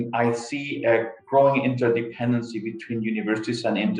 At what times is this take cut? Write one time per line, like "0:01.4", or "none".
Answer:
none